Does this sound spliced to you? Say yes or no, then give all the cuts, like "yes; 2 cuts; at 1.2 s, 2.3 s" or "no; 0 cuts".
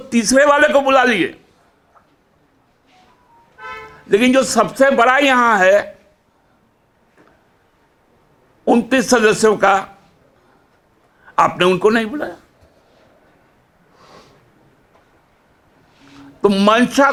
no; 0 cuts